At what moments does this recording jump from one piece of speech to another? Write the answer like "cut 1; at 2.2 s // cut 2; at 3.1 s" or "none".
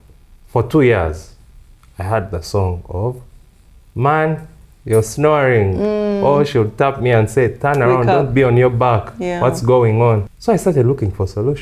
cut 1; at 10.3 s